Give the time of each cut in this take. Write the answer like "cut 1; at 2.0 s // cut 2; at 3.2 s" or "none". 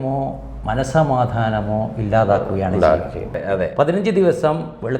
cut 1; at 3.4 s